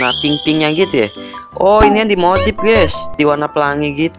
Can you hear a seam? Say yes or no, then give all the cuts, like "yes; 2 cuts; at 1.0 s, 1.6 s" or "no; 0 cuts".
yes; 1 cut; at 3.2 s